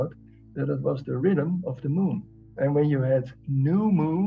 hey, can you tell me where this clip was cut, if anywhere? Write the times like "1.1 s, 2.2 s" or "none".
1.2 s, 2.5 s